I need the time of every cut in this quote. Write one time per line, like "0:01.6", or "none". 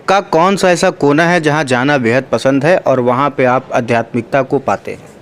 none